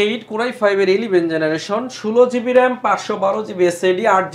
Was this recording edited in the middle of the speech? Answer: no; 0 cuts

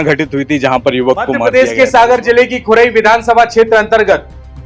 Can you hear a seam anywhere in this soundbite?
yes; 1 cut; at 1.4 s

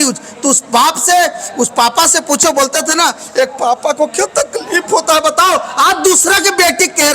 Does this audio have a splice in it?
no; 0 cuts

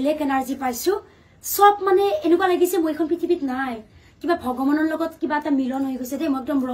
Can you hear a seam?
no; 0 cuts

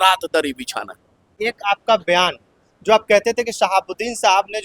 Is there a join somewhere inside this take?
yes; 1 cut; at 1.3 s

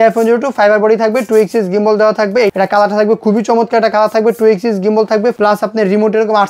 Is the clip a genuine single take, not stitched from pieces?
no; 2 cuts; at 2.5 s, 5.4 s

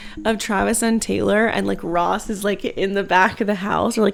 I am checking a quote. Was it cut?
no; 0 cuts

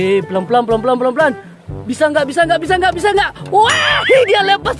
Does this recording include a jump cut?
no; 0 cuts

